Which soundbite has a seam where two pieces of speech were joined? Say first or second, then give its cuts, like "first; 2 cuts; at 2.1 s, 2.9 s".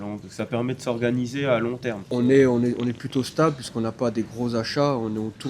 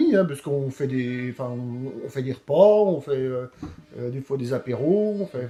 first; 1 cut; at 2.0 s